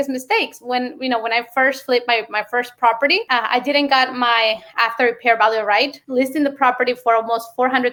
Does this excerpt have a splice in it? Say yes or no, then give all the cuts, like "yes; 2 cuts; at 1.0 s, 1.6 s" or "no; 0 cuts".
no; 0 cuts